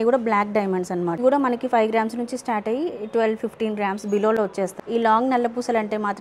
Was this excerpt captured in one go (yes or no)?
no